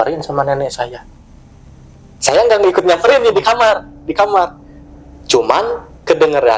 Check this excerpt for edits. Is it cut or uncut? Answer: uncut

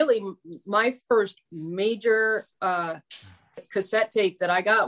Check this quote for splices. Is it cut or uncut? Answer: cut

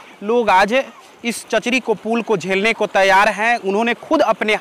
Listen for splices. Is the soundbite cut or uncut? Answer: uncut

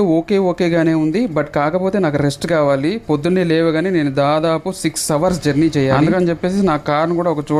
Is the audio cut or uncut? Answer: uncut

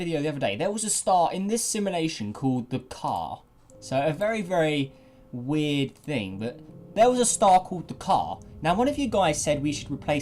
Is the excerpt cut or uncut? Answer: cut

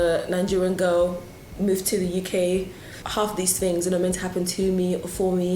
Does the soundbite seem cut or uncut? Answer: cut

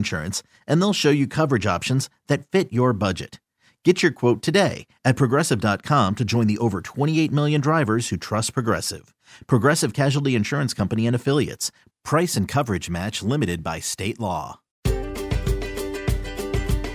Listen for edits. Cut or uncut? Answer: cut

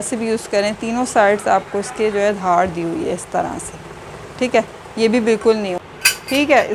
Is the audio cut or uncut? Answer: cut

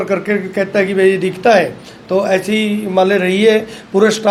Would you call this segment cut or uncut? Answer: uncut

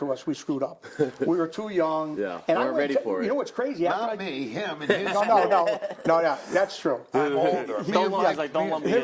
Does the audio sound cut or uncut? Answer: uncut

